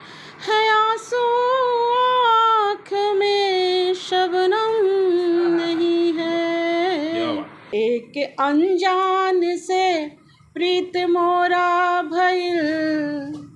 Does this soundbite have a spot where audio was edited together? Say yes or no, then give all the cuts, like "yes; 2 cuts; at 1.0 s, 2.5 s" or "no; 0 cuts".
yes; 1 cut; at 7.6 s